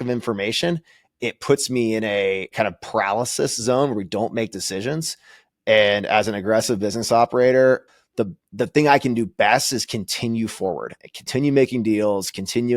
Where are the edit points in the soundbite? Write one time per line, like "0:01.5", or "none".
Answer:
0:07.8

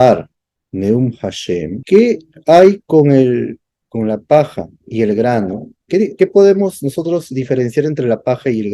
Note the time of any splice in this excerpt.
0:01.8
0:06.1

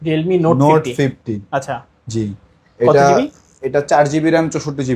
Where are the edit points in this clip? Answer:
none

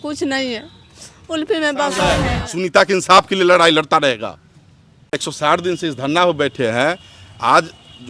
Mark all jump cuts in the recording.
0:02.4
0:05.1

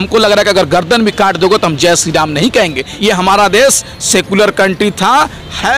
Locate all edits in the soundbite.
0:02.9

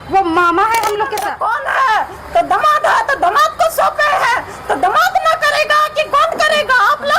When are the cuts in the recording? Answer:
0:01.3

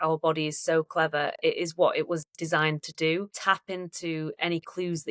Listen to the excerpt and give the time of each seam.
0:03.3

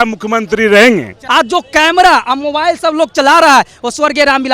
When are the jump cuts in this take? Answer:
0:01.2

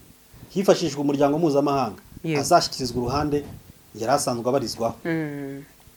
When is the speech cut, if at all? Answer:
none

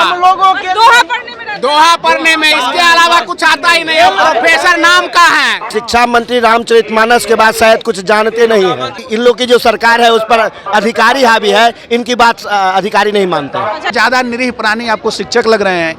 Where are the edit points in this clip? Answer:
0:05.6
0:09.0
0:13.9

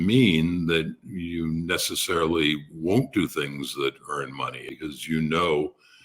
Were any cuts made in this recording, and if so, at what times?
0:04.6

